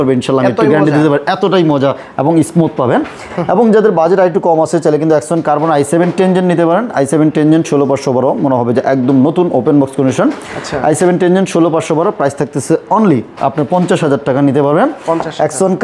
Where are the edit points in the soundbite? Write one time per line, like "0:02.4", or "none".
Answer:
none